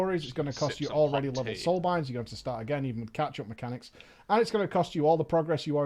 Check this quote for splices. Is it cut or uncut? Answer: cut